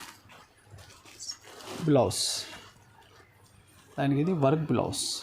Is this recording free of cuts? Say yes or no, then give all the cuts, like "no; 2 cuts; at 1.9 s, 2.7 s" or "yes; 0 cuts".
no; 1 cut; at 3.8 s